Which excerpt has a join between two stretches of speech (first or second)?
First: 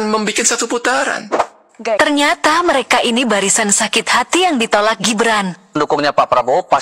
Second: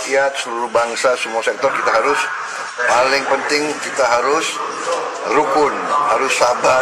first